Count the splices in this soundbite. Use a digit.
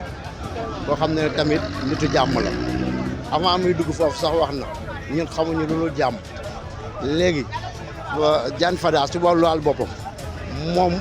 0